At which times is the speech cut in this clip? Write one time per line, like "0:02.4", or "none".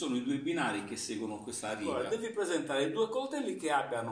0:01.8